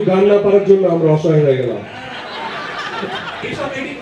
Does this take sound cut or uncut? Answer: uncut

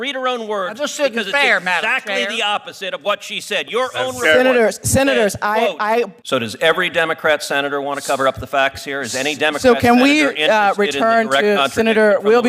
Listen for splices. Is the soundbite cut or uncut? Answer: cut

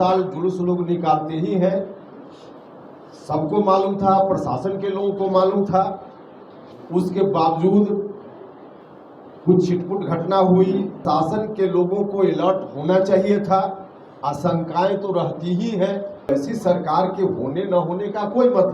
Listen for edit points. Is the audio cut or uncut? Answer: cut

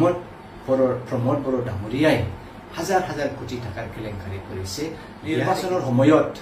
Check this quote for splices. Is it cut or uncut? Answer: cut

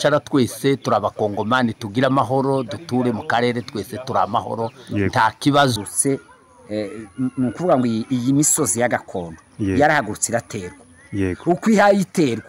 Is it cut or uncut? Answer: cut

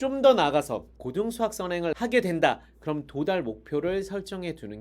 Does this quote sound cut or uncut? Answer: cut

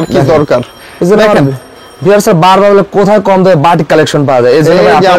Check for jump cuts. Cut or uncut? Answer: uncut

